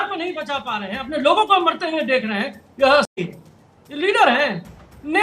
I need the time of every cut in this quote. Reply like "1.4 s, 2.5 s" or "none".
3.1 s